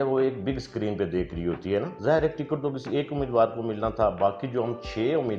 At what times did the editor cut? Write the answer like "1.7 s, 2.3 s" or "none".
1.9 s